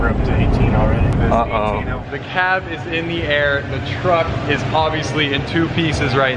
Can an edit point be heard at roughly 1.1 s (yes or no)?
yes